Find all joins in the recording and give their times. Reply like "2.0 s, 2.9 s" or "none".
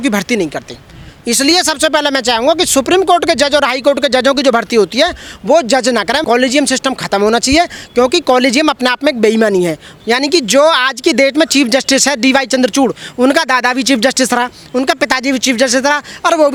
none